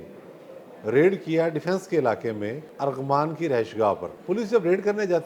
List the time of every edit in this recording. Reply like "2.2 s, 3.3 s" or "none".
2.7 s, 4.1 s